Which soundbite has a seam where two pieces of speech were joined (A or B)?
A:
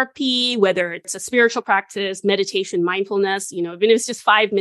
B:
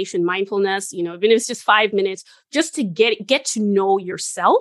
A